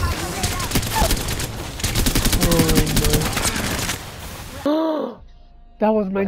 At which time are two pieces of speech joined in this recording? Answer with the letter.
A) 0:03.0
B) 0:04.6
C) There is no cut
B